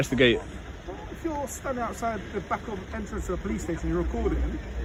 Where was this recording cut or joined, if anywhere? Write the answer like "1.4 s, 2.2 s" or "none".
none